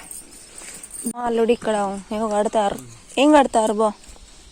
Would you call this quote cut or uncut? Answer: cut